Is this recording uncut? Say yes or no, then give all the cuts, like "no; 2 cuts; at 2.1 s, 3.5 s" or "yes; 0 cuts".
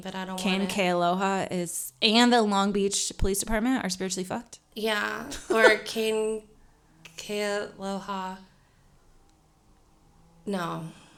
yes; 0 cuts